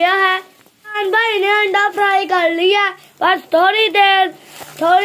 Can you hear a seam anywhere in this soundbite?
yes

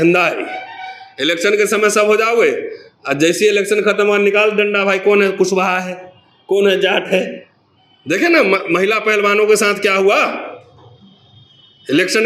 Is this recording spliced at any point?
no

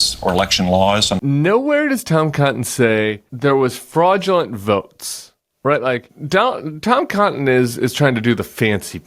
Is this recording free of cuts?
no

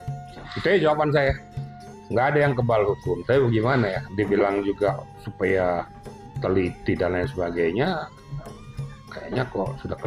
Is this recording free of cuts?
yes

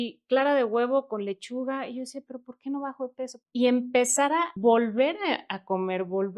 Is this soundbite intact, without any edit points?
no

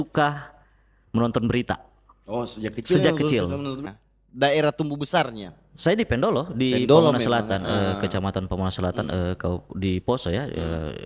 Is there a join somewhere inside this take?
yes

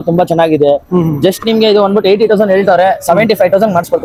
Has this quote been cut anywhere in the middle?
no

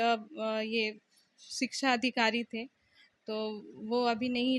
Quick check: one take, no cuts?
yes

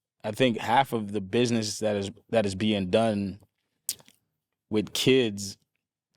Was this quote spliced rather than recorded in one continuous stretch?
no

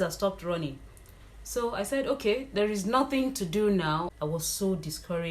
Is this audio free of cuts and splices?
no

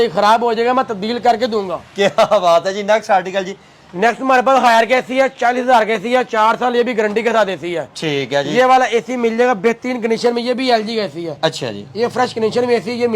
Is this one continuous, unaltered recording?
yes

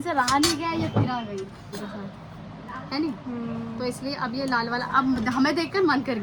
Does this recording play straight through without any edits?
yes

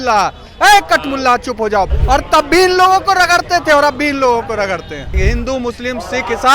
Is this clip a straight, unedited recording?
no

